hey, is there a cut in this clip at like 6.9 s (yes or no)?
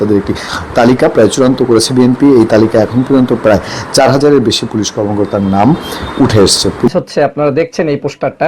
yes